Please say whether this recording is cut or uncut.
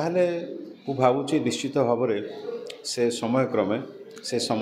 uncut